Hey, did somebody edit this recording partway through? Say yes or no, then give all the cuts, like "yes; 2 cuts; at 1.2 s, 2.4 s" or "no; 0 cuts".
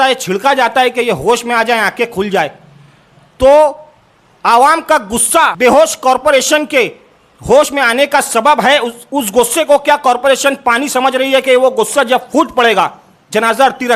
yes; 1 cut; at 5.6 s